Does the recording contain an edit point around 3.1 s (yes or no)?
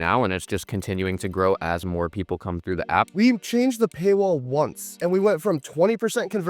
yes